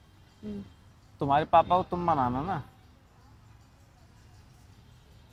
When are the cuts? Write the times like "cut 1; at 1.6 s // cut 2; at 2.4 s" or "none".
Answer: none